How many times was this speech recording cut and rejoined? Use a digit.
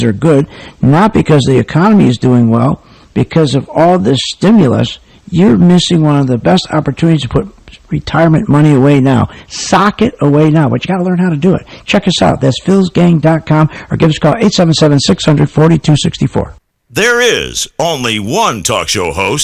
1